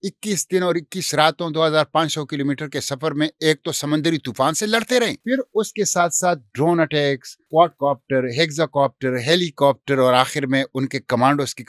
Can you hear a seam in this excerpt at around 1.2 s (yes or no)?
no